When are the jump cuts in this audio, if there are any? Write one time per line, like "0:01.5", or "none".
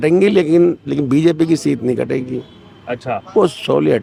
none